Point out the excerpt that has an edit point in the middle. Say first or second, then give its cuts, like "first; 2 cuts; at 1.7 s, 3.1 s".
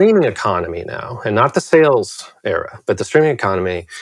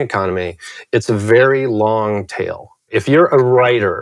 second; 1 cut; at 2.9 s